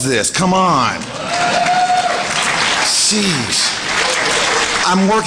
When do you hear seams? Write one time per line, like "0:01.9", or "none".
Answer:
0:03.4